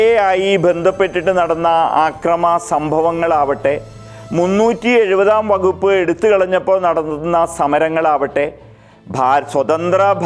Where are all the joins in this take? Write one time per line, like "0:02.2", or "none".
none